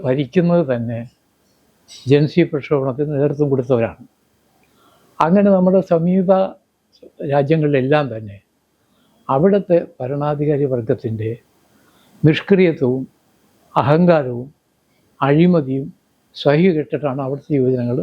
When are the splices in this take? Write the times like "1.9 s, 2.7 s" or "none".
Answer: none